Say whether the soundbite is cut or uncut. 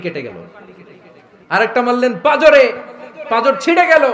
uncut